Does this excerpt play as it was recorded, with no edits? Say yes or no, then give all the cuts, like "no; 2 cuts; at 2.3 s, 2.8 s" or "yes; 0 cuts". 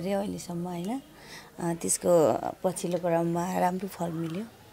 yes; 0 cuts